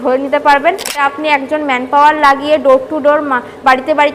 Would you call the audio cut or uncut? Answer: cut